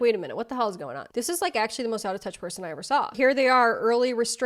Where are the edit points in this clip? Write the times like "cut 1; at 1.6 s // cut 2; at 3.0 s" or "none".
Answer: cut 1; at 3.1 s